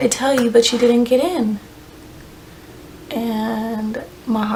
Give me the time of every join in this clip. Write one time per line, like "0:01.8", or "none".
none

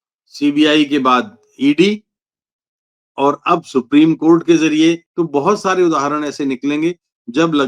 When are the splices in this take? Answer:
0:05.1

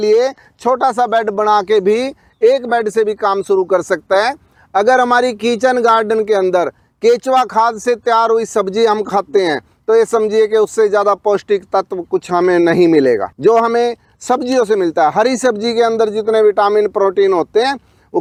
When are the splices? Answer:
none

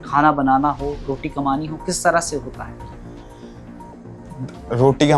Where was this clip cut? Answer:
none

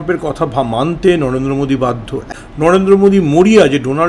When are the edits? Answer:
0:02.4

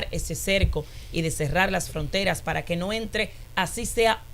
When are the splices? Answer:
none

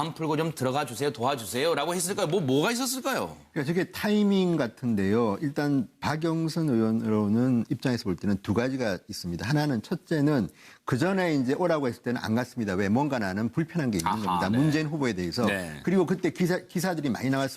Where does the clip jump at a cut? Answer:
0:11.2

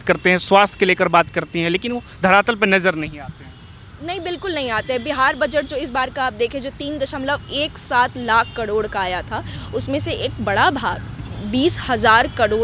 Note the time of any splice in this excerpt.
none

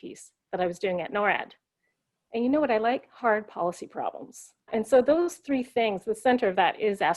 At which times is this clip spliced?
0:04.7

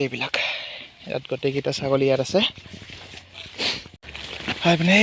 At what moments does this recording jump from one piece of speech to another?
0:03.9

